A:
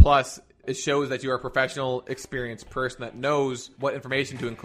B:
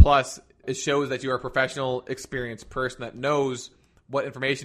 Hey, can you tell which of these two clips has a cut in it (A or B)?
A